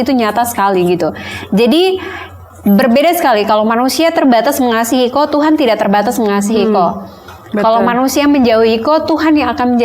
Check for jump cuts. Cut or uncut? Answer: uncut